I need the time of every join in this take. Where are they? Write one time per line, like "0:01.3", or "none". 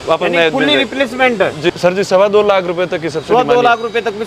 0:01.7